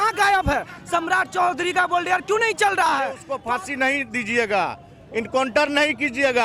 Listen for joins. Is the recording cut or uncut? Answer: cut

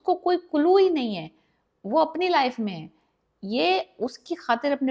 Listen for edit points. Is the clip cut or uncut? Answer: uncut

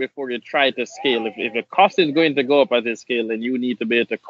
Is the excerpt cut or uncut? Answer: uncut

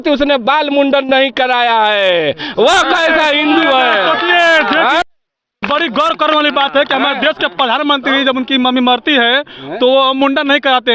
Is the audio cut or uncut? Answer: uncut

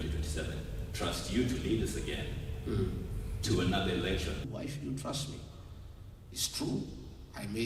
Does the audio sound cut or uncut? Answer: cut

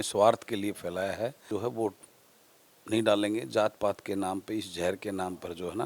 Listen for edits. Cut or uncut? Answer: cut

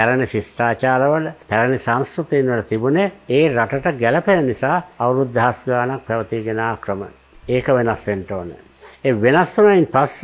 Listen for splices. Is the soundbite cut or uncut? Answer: uncut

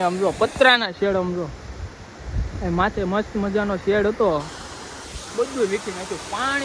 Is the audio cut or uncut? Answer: uncut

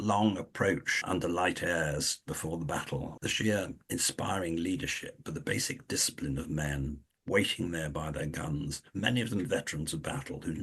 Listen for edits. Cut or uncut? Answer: cut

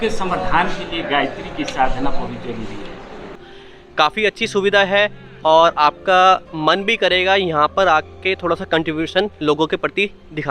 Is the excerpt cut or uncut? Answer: cut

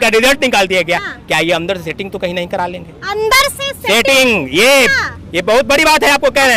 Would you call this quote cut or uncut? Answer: uncut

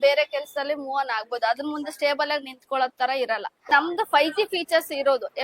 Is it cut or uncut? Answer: cut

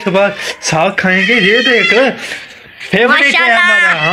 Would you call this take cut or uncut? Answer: uncut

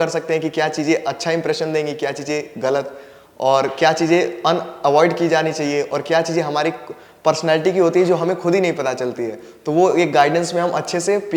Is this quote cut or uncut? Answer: uncut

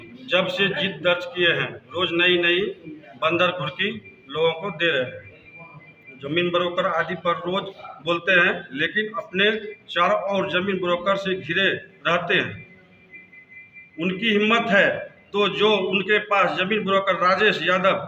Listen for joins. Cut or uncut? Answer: uncut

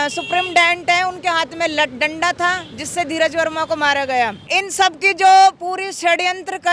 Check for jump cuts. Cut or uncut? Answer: cut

